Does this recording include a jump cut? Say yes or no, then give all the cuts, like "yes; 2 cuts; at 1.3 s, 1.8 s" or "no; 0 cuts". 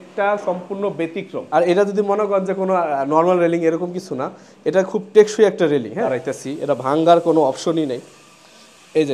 yes; 2 cuts; at 1.4 s, 6.0 s